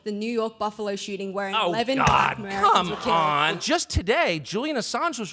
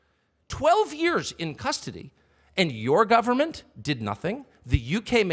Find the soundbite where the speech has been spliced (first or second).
first